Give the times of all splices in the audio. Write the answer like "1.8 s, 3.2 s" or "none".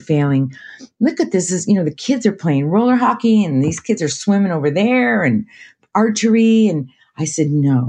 none